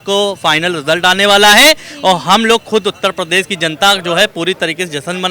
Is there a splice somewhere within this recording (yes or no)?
no